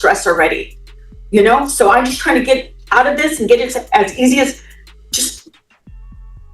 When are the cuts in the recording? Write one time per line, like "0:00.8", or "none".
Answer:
none